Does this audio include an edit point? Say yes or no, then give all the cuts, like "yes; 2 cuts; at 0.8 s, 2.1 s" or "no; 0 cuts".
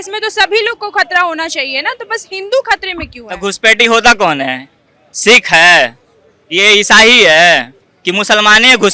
no; 0 cuts